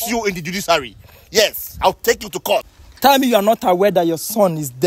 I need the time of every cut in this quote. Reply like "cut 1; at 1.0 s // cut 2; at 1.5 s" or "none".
cut 1; at 2.8 s